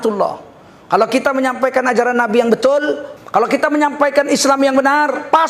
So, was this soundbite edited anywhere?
yes; 1 cut; at 3.0 s

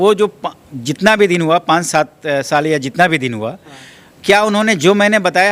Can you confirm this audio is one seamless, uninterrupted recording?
yes; 0 cuts

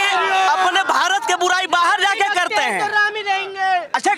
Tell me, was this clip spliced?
no; 0 cuts

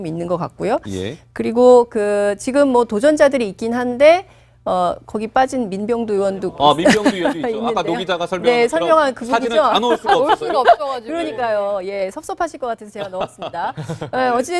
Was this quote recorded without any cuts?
no; 1 cut; at 12.6 s

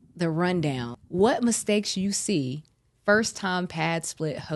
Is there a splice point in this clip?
yes; 1 cut; at 0.9 s

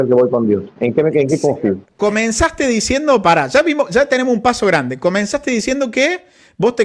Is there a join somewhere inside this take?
yes; 1 cut; at 1.9 s

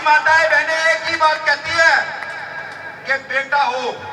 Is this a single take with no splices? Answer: yes; 0 cuts

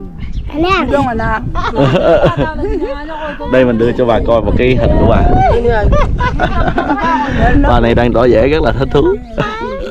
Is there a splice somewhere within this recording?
no; 0 cuts

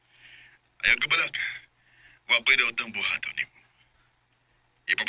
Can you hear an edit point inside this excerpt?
no; 0 cuts

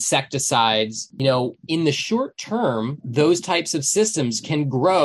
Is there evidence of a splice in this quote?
yes; 1 cut; at 3.0 s

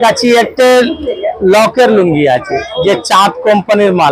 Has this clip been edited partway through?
no; 0 cuts

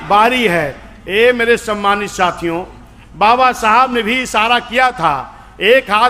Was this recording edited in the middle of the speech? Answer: no; 0 cuts

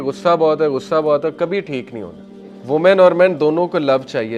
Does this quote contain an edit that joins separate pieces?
yes; 1 cut; at 2.5 s

